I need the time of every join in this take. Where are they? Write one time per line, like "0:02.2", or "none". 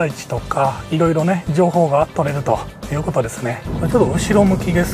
0:03.7

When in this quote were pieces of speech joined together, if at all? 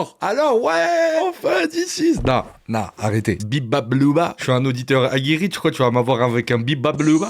0:01.2
0:03.4
0:04.4

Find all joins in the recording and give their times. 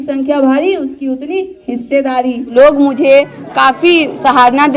0:02.5

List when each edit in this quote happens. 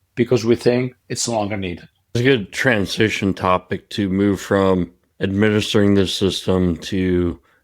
0:02.2

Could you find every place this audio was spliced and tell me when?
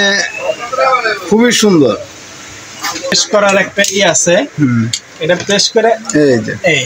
0:03.2

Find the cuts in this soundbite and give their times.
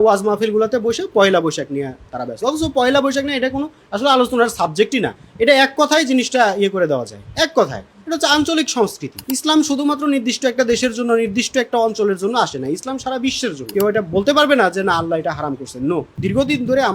0:09.1
0:13.7
0:16.1

